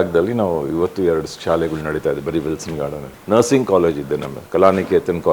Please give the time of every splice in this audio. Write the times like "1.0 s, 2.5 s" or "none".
3.1 s